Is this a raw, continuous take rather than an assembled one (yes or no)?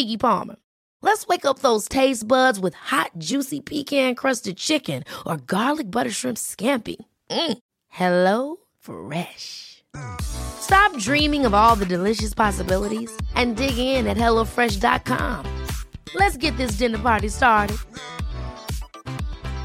yes